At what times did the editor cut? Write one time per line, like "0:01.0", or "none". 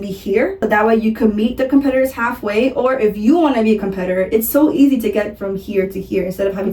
none